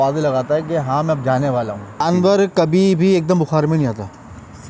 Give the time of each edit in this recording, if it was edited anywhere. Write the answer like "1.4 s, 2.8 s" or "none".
2.0 s